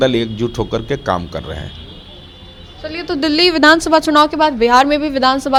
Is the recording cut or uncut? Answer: uncut